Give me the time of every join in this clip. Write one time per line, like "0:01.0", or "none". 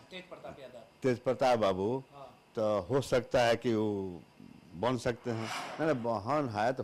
0:05.6